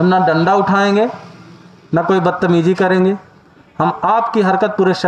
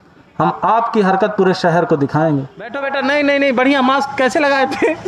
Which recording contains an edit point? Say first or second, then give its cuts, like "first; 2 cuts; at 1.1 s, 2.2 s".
second; 1 cut; at 2.8 s